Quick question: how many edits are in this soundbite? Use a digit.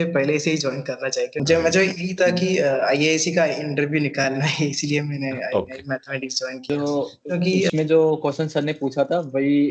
2